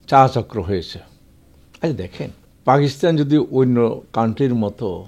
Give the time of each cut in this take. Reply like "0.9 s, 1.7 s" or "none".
2.5 s